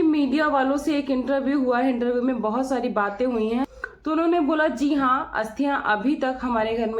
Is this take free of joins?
no; 1 cut; at 3.9 s

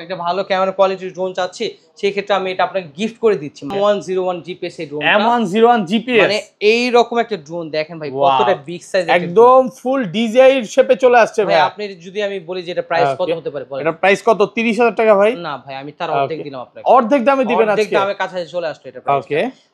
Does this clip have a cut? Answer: yes; 1 cut; at 3.7 s

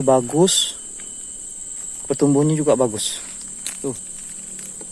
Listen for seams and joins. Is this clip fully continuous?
yes; 0 cuts

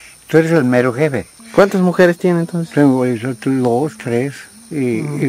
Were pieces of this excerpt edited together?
yes; 1 cut; at 1.4 s

